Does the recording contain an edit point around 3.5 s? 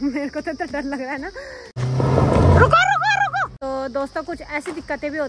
yes; 2 cuts; at 1.7 s, 3.5 s

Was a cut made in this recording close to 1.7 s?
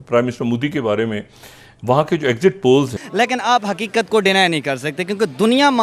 no; 1 cut; at 3.0 s

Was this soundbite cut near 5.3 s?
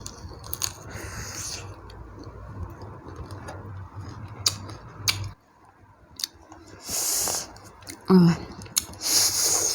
yes; 1 cut; at 5.3 s

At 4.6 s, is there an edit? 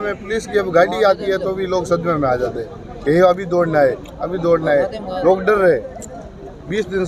no; 0 cuts

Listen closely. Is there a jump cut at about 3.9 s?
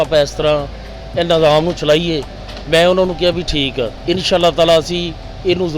yes; 1 cut; at 3.9 s

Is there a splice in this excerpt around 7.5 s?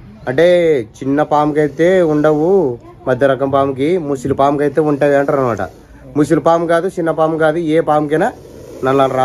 no; 0 cuts

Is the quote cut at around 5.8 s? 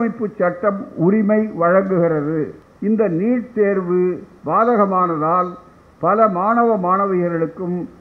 no; 1 cut; at 2.6 s

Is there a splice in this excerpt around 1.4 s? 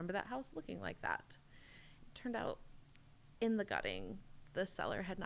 no; 0 cuts

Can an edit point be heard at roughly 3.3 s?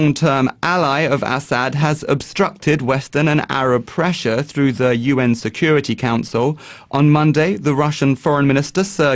no; 1 cut; at 6.2 s

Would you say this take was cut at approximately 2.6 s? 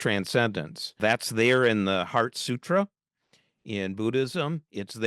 no; 1 cut; at 1.0 s

